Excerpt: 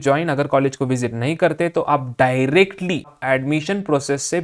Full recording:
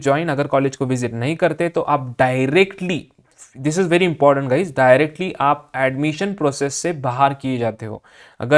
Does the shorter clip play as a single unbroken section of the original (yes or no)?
no